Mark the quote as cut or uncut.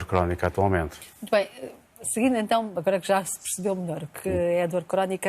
uncut